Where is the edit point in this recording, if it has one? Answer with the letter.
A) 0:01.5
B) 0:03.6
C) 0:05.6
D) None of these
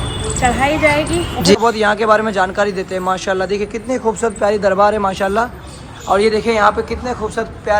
A